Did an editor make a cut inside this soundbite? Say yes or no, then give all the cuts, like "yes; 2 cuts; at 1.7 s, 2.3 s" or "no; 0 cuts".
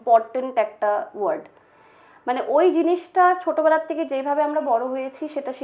no; 0 cuts